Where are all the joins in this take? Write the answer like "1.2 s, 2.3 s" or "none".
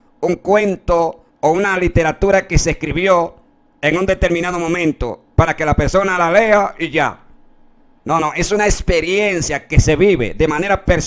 none